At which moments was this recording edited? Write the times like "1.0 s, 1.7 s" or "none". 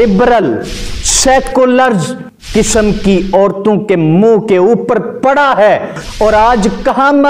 6.0 s